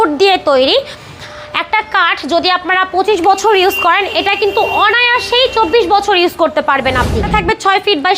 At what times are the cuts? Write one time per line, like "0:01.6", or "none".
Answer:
0:07.2